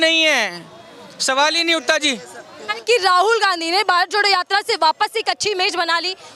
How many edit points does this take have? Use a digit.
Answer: 1